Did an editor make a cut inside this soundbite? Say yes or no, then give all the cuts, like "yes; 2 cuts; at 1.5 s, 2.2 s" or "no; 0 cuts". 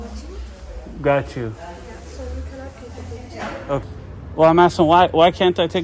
yes; 1 cut; at 3.8 s